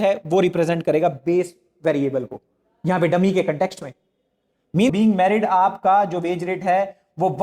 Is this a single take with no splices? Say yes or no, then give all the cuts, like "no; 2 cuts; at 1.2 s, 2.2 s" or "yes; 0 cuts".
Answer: no; 1 cut; at 4.9 s